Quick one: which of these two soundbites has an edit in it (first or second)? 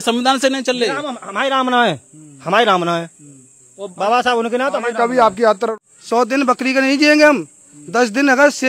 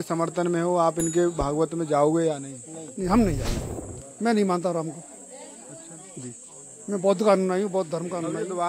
first